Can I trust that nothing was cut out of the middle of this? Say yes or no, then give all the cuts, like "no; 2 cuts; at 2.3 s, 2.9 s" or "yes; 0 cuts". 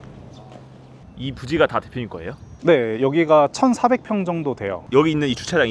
yes; 0 cuts